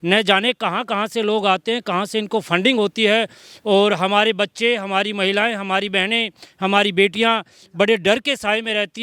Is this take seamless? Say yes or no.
yes